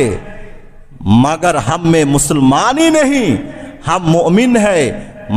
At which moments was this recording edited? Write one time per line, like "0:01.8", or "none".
none